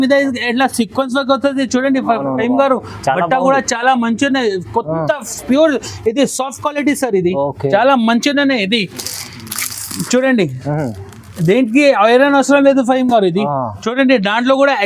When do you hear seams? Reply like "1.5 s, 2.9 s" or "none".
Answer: none